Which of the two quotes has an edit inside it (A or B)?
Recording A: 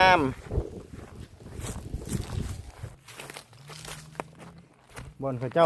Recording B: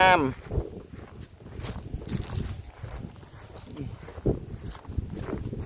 A